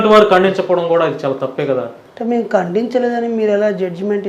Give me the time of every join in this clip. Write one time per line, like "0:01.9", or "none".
0:02.0